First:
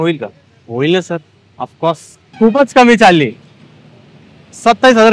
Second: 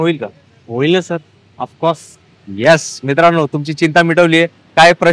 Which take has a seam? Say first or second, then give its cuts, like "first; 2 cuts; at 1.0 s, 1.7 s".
first; 1 cut; at 2.2 s